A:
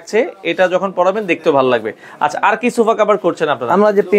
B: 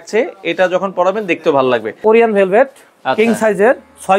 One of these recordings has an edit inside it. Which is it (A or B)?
B